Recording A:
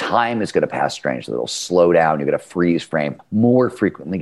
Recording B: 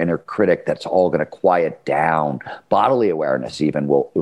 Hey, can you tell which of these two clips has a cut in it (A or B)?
A